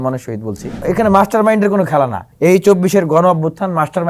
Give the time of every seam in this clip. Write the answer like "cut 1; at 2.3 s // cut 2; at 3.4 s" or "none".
cut 1; at 0.8 s // cut 2; at 2.2 s

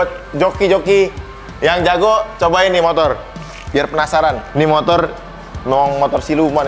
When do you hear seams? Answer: none

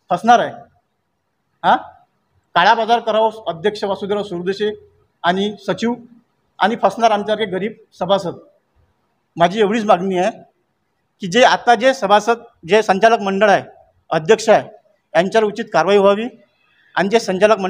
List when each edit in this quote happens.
none

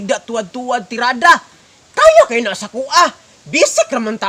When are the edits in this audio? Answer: none

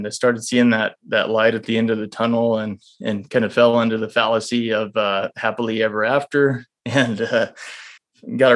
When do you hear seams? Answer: none

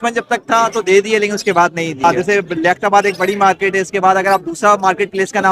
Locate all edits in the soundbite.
cut 1; at 2.0 s

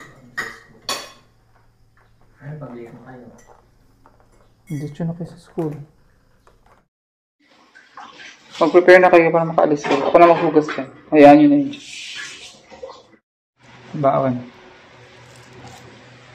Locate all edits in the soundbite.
cut 1; at 6.9 s // cut 2; at 13.1 s

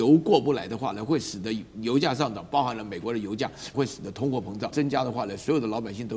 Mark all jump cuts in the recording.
cut 1; at 3.7 s // cut 2; at 4.7 s

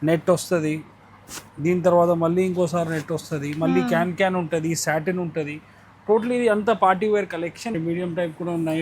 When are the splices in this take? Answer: cut 1; at 7.7 s

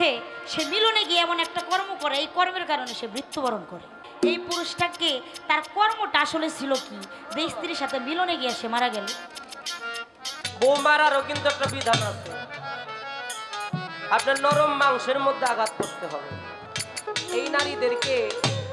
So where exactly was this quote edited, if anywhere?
cut 1; at 4.0 s // cut 2; at 10.4 s // cut 3; at 17.1 s

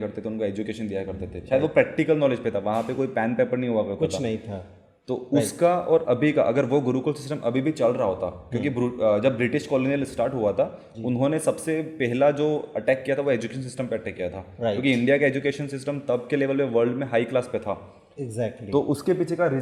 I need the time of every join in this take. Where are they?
none

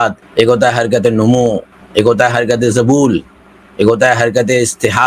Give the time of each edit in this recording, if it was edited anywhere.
none

